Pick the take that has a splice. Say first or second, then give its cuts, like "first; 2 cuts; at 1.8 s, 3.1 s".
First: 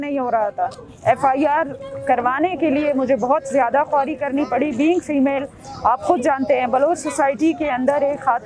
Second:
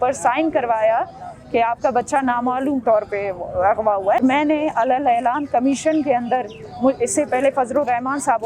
second; 1 cut; at 4.2 s